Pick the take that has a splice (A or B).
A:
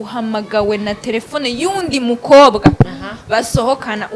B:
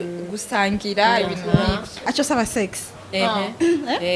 B